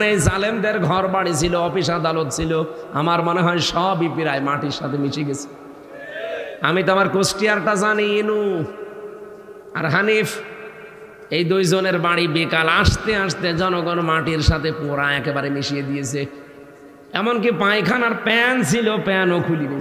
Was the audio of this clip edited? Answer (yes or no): no